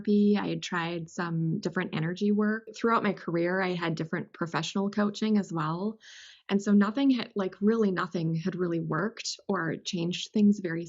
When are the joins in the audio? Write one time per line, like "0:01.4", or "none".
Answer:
0:02.7

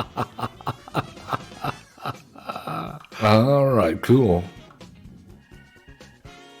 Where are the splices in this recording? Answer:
0:03.2
0:05.4

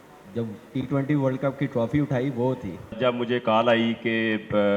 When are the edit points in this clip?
0:02.9

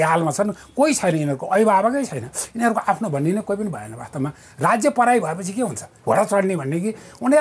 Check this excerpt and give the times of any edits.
0:05.9

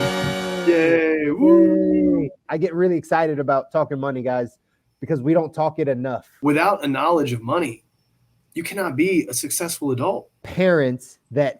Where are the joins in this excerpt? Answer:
0:06.3
0:10.4

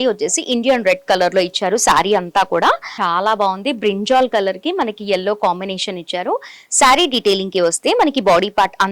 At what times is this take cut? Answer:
0:02.9

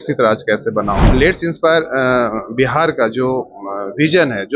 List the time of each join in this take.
0:01.1

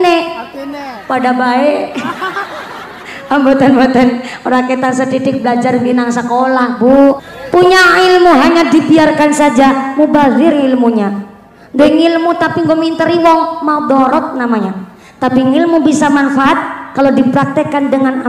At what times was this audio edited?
0:07.3

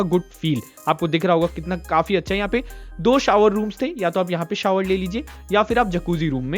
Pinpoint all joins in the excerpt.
none

